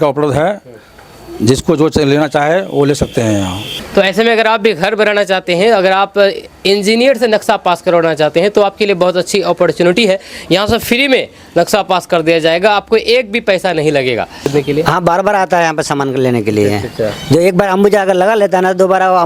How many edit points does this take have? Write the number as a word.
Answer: two